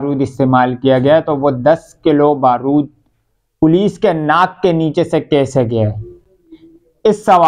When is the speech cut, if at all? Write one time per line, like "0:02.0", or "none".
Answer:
none